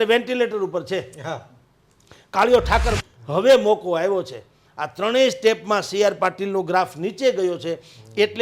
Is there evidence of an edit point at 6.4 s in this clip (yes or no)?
no